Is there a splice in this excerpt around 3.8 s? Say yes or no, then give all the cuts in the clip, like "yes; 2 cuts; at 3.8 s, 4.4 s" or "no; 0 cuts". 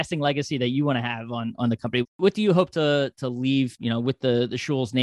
yes; 2 cuts; at 2.2 s, 3.8 s